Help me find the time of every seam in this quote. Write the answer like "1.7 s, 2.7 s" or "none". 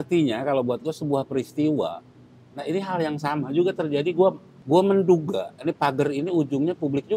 4.5 s